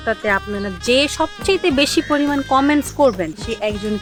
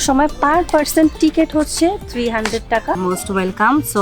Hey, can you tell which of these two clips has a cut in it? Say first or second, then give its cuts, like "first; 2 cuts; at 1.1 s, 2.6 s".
second; 1 cut; at 3.0 s